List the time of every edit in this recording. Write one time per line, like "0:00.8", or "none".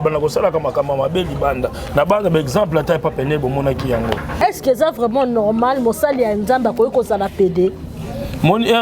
0:04.3